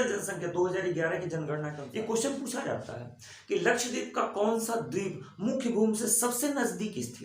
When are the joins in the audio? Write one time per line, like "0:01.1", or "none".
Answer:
0:01.8